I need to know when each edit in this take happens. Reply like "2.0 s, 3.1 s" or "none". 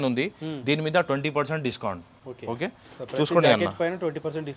none